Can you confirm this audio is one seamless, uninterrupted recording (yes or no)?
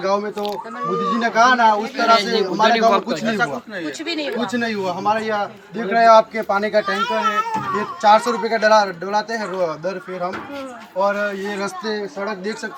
yes